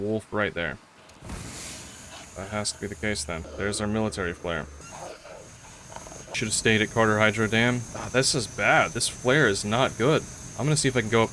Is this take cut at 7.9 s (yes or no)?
yes